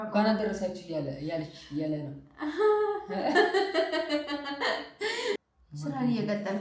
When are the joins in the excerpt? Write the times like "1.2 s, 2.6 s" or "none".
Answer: 5.4 s

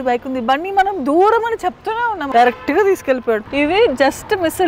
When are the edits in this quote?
2.2 s, 3.4 s

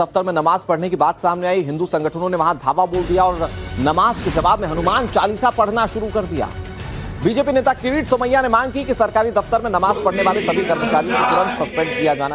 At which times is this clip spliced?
none

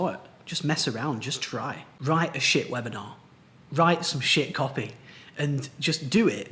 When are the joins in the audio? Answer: 1.8 s

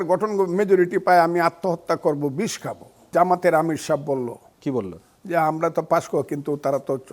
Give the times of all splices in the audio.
3.0 s

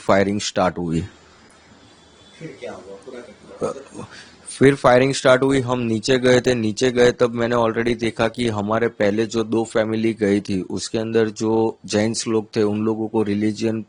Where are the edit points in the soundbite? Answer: none

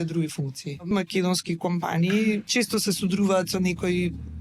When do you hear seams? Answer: 0.9 s, 2.5 s

